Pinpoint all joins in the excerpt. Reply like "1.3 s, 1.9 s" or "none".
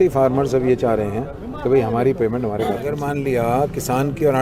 3.0 s